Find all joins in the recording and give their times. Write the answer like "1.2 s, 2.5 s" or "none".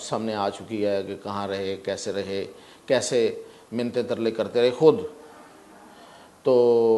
none